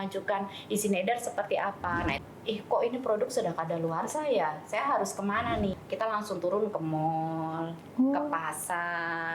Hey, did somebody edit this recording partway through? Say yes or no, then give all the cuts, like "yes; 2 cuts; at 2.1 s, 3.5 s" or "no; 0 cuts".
yes; 2 cuts; at 2.2 s, 5.8 s